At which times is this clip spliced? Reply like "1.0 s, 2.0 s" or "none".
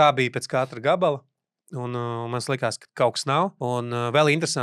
3.6 s